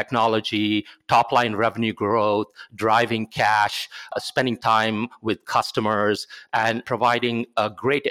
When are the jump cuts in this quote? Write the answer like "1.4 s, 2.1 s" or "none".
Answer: 4.1 s, 6.8 s